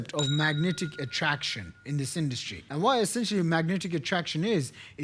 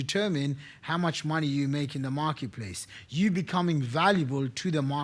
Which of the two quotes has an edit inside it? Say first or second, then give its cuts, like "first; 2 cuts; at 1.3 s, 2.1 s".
first; 1 cut; at 2.5 s